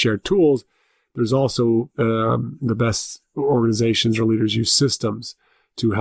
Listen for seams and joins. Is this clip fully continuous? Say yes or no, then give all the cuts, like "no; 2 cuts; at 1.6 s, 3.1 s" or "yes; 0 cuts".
yes; 0 cuts